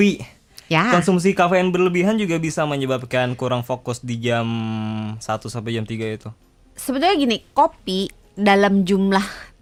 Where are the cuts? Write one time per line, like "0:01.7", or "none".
none